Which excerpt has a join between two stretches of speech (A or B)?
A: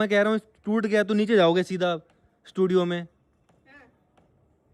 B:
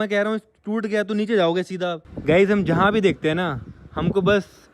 B